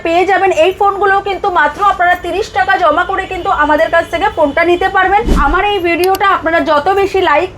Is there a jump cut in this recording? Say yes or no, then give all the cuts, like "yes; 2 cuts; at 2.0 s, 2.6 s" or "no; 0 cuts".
yes; 1 cut; at 5.4 s